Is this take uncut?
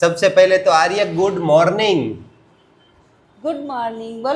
yes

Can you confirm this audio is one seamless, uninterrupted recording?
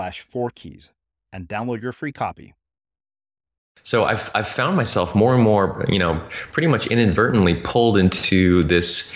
no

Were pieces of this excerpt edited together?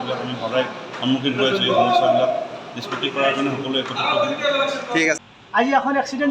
yes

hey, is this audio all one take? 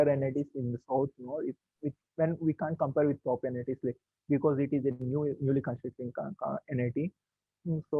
yes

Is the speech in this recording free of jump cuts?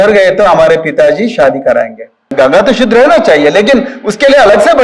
no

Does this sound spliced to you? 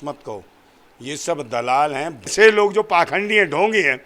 yes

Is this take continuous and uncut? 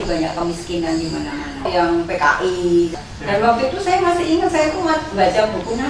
no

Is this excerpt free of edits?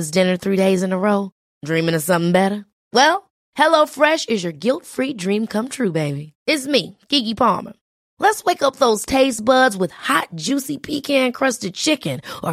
yes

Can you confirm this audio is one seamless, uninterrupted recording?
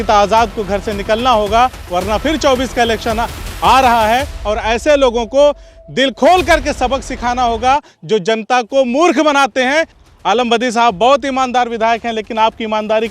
no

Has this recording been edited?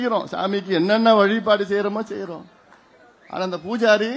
no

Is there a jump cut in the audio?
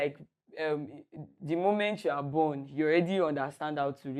no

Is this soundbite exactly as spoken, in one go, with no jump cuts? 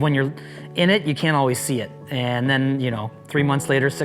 no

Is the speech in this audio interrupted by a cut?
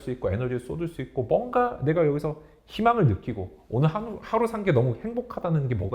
no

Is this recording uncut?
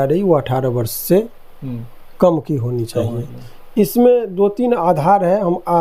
yes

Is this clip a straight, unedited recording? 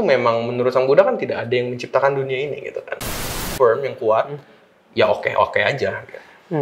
no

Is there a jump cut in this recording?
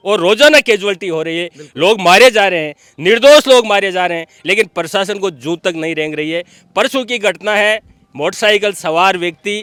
no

